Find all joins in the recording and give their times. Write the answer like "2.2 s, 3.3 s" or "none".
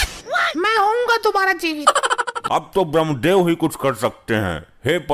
2.4 s